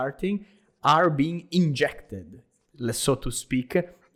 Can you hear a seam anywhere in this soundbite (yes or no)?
no